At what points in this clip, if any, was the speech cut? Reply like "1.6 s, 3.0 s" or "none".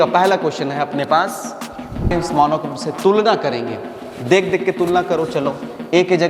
2.1 s